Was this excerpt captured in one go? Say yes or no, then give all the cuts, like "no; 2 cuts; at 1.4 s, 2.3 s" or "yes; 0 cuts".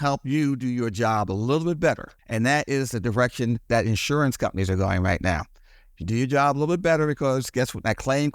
no; 1 cut; at 2.2 s